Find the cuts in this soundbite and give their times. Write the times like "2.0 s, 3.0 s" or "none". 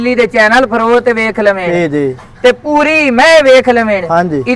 none